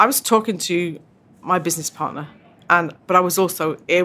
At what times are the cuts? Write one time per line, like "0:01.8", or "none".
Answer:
none